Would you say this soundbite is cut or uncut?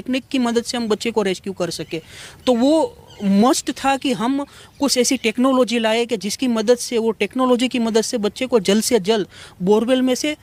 uncut